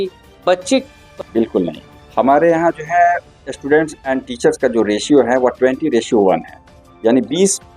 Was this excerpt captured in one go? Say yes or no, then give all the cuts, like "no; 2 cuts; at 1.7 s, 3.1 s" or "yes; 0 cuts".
no; 1 cut; at 1.3 s